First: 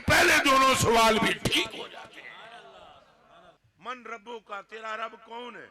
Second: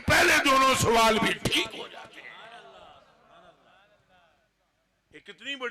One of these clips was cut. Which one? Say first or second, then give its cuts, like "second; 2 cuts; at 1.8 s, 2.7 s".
first; 1 cut; at 3.6 s